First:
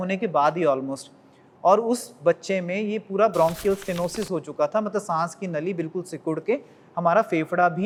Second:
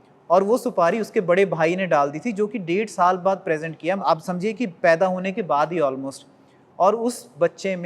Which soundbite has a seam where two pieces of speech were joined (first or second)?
second